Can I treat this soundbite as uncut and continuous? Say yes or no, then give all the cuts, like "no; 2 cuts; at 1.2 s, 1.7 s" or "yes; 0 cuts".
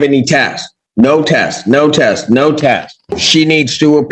no; 1 cut; at 3.0 s